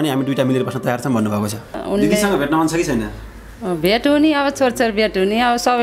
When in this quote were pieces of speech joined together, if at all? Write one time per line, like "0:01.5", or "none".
0:01.8